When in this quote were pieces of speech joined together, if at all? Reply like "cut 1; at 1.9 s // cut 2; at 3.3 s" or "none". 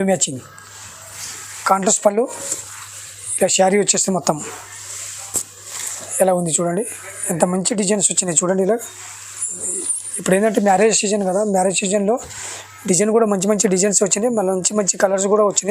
none